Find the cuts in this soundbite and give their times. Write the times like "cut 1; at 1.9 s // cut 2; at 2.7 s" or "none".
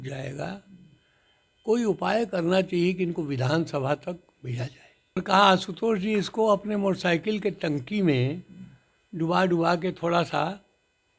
cut 1; at 5.2 s

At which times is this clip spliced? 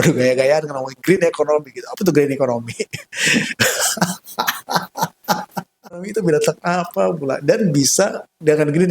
cut 1; at 6.1 s

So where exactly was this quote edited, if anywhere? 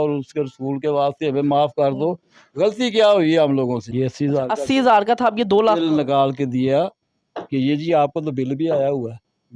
cut 1; at 3.8 s

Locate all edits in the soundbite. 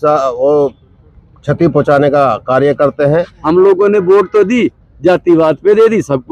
cut 1; at 3.4 s

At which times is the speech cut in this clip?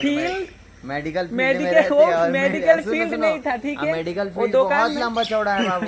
none

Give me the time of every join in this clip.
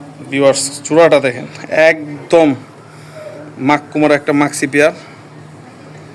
none

